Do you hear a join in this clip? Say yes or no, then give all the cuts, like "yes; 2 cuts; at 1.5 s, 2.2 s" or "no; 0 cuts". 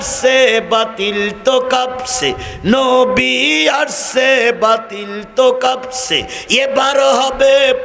no; 0 cuts